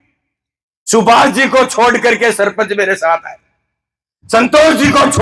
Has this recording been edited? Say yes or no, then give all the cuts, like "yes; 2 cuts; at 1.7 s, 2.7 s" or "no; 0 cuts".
no; 0 cuts